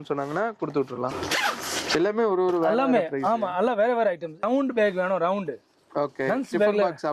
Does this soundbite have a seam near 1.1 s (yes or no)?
yes